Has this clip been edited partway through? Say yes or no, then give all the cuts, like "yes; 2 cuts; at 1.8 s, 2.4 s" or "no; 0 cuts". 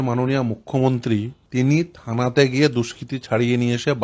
yes; 1 cut; at 1.4 s